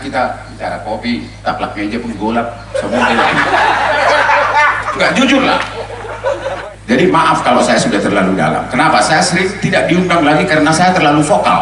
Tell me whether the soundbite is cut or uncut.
cut